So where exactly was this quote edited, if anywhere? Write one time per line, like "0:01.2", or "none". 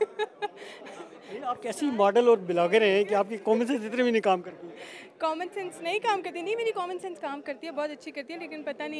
none

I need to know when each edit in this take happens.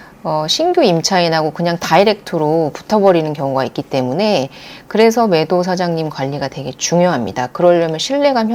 none

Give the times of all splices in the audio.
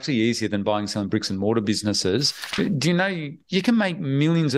0:02.4

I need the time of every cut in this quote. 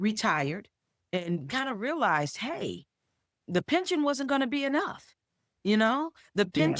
none

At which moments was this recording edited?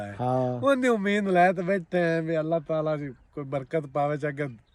none

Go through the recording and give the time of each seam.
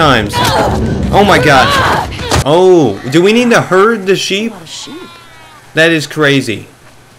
0:02.3

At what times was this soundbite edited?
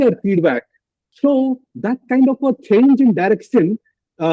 0:01.0

